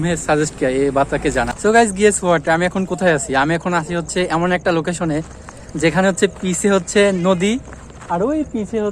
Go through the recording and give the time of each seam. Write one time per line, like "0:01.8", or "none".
0:01.5